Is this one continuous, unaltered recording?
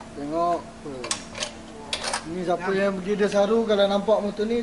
yes; 0 cuts

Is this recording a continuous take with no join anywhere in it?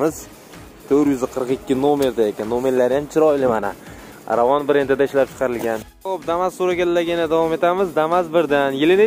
no; 1 cut; at 5.6 s

